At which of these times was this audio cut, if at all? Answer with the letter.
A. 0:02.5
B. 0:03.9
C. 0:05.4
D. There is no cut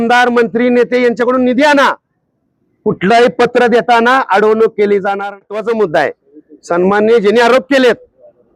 C